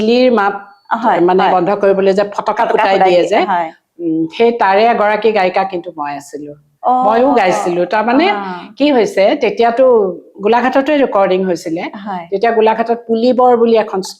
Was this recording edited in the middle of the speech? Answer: no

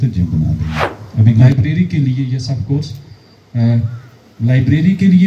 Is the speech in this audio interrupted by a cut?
yes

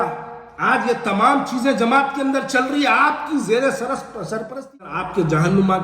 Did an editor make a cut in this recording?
yes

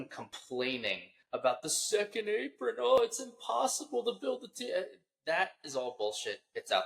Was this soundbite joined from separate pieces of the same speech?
yes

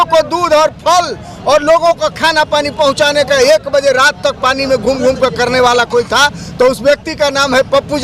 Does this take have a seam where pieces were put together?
no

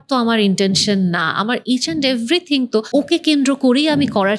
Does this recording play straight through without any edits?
no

